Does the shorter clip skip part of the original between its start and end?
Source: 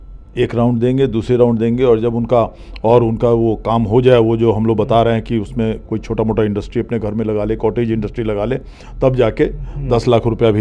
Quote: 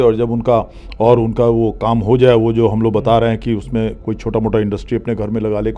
no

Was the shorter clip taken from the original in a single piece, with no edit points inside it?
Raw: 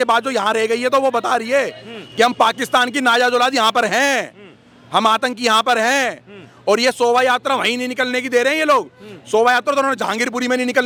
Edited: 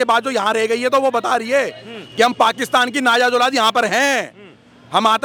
yes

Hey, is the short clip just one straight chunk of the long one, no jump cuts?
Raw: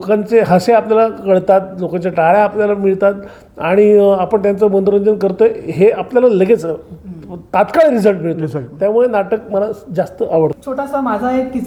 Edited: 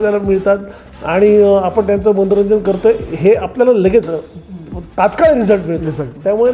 yes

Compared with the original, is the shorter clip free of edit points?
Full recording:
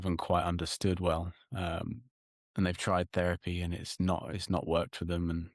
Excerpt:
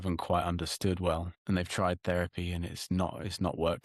no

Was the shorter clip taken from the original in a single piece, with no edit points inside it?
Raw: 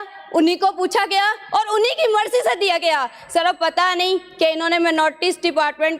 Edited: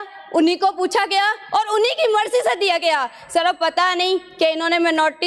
yes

